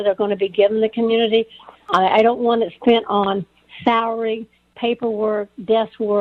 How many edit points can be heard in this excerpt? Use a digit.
0